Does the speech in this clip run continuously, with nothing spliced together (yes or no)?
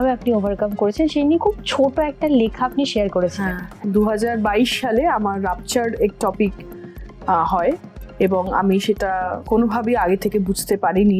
no